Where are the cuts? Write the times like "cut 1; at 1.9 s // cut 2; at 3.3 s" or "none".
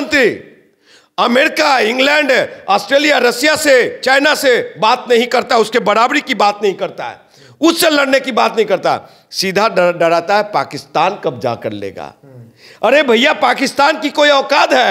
none